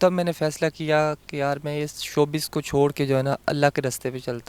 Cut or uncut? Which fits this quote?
uncut